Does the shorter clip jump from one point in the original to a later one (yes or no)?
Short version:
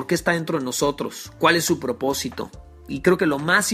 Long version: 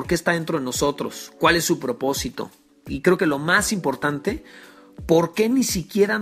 no